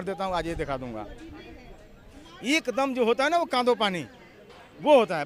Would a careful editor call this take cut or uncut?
uncut